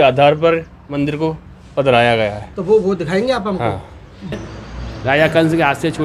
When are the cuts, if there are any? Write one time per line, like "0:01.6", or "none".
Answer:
0:04.4